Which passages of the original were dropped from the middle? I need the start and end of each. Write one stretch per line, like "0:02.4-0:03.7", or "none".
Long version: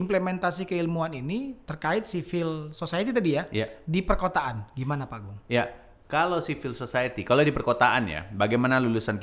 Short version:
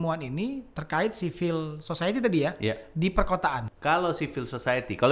0:04.6-0:06.0